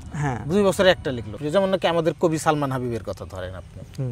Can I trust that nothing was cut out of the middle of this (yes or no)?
no